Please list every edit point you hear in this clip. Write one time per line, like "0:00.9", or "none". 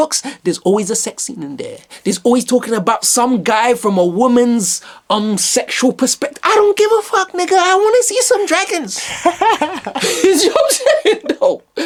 none